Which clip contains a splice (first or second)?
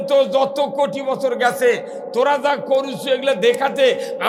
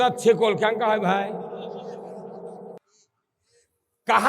second